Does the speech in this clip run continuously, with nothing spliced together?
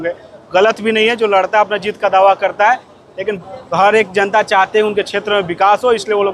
no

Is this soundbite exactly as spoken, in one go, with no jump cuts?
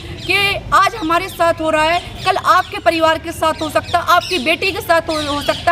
yes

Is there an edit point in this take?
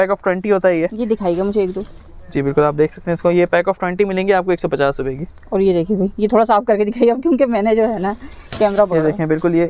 no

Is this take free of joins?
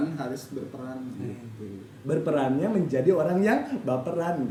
yes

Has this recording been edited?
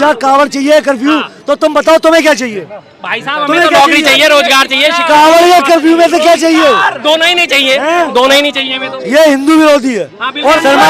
no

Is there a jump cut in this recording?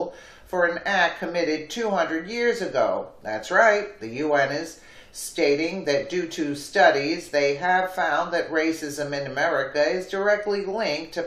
yes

